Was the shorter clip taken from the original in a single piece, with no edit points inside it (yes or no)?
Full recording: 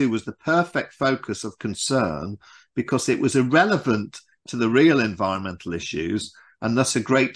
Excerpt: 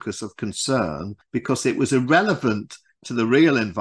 no